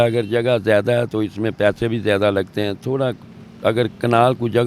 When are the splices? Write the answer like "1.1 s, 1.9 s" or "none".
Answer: none